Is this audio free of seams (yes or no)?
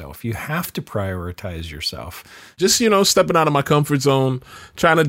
no